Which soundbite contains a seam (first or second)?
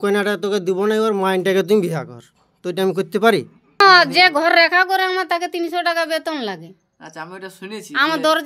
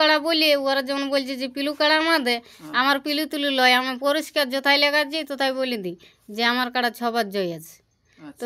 first